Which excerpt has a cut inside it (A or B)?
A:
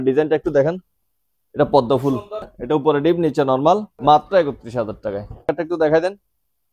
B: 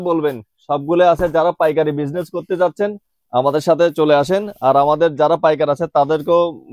A